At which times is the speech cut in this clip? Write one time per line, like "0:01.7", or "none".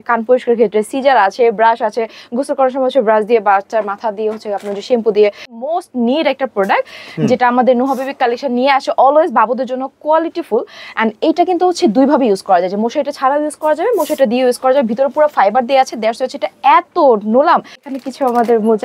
0:05.6
0:17.8